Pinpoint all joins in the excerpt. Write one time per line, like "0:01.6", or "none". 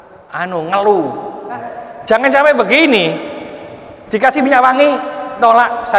0:01.7